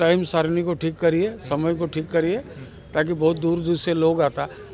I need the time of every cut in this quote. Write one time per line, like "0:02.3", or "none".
none